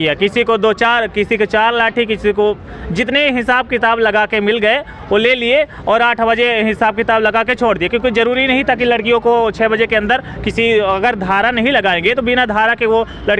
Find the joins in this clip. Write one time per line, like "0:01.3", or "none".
none